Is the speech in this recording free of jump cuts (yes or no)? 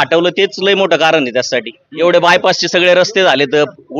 no